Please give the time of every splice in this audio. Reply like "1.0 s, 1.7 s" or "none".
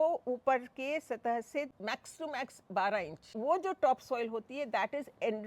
1.7 s, 3.3 s